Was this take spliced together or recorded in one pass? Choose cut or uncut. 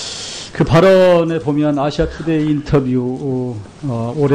cut